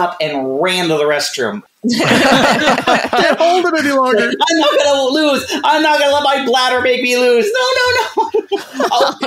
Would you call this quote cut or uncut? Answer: cut